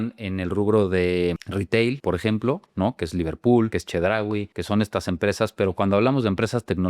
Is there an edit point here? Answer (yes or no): no